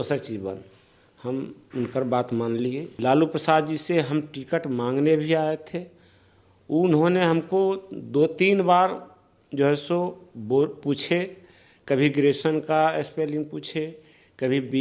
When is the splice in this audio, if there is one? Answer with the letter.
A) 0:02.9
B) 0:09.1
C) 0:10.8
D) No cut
A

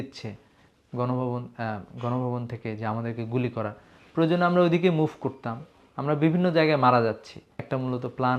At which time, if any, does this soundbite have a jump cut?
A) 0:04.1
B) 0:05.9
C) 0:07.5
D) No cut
C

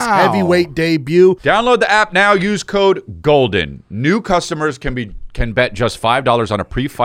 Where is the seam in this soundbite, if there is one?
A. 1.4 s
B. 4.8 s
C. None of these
A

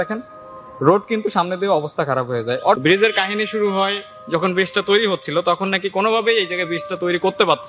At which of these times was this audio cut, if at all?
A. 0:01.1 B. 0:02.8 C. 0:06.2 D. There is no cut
B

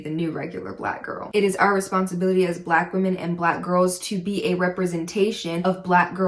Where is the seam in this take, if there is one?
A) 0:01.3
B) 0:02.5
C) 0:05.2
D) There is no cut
A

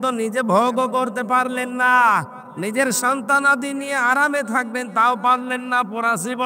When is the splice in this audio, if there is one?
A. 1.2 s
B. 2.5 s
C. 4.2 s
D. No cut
D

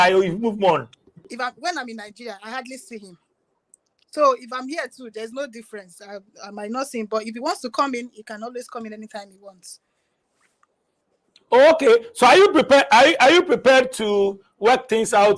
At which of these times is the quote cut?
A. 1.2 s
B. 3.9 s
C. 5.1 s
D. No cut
A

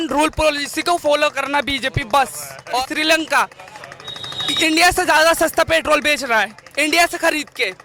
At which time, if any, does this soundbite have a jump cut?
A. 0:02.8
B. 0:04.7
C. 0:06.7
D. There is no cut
A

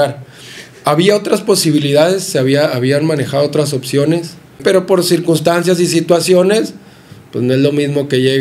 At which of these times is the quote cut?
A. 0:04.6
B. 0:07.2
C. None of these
A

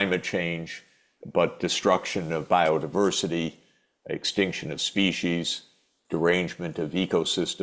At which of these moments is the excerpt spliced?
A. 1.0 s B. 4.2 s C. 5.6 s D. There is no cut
D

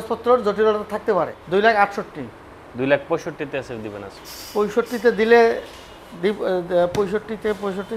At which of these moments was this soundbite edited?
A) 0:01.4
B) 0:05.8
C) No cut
A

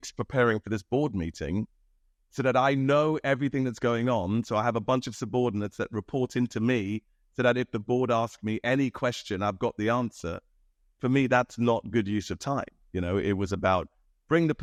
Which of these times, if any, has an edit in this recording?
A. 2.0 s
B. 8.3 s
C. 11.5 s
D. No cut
D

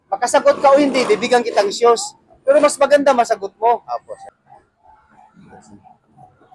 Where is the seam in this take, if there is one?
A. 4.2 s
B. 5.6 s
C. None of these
A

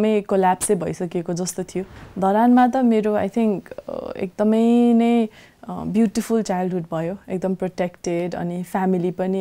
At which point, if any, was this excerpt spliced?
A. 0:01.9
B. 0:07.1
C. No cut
A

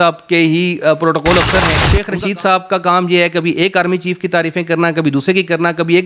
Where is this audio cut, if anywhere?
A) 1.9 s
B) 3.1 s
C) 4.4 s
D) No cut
A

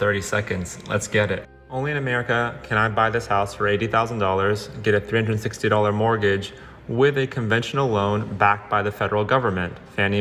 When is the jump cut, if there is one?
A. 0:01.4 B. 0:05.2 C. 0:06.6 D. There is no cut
A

